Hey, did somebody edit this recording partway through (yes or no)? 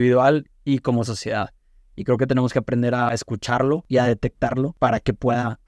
yes